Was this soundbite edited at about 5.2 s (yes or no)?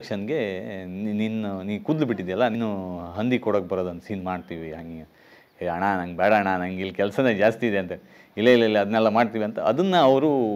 no